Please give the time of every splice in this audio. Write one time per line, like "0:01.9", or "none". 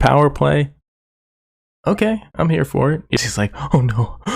0:03.2